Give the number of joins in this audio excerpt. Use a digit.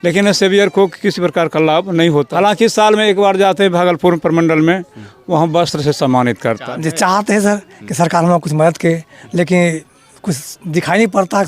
2